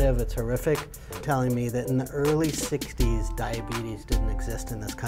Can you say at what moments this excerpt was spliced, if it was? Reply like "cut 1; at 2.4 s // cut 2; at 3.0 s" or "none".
cut 1; at 1.2 s